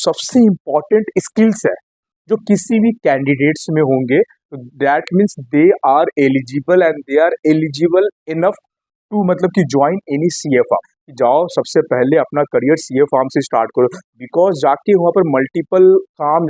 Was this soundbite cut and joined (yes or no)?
yes